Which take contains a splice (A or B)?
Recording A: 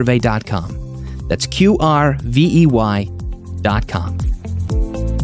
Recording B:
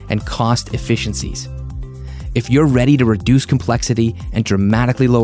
A